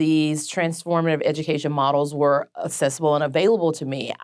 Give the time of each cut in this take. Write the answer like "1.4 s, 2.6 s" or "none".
none